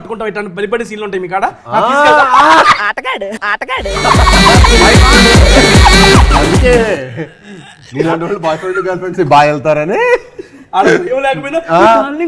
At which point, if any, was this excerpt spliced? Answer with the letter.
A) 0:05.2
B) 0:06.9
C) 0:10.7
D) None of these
D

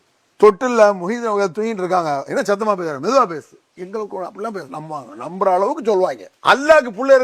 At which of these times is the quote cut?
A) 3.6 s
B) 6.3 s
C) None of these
B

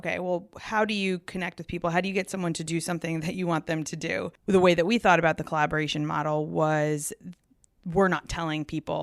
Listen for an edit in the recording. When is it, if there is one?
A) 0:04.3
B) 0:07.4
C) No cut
A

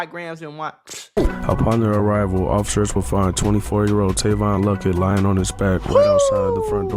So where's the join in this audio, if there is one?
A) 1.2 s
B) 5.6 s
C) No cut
A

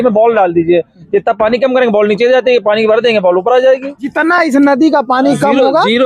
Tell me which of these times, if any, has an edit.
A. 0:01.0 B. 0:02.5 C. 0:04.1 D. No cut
C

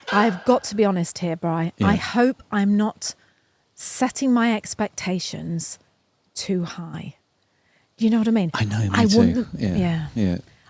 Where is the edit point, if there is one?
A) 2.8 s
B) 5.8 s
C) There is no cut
C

